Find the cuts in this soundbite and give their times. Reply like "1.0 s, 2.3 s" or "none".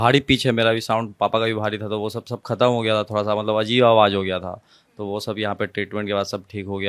none

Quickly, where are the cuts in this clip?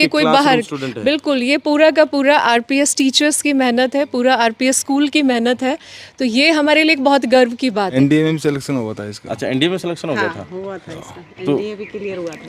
7.9 s

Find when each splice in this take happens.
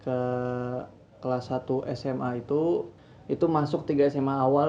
2.9 s

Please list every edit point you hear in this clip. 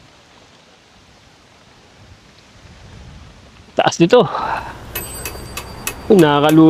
none

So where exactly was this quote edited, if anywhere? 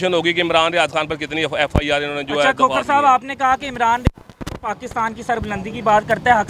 none

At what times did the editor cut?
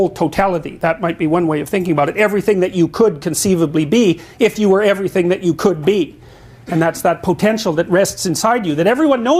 7.9 s

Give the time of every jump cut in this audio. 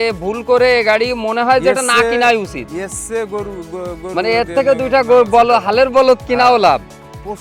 none

